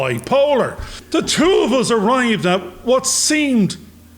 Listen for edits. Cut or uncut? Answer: cut